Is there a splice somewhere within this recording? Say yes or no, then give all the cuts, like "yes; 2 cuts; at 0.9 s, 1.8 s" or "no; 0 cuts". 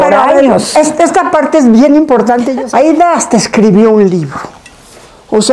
yes; 1 cut; at 2.5 s